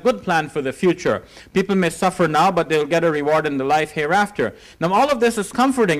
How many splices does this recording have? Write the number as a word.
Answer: zero